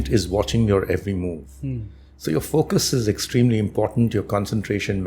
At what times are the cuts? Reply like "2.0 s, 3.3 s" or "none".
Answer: none